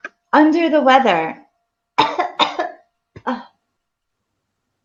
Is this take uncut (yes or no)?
yes